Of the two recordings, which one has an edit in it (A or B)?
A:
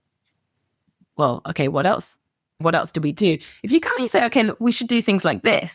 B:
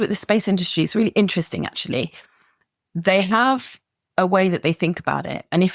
A